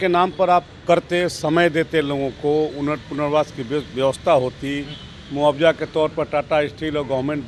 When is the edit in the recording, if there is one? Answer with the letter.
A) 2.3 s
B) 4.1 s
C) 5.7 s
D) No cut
D